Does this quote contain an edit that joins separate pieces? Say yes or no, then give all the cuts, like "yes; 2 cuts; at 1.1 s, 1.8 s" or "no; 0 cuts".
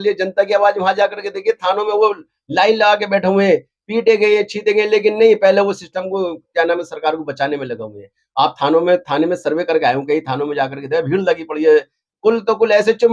no; 0 cuts